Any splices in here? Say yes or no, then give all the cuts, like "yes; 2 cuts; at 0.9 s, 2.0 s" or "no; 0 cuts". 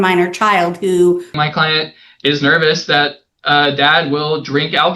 yes; 1 cut; at 1.3 s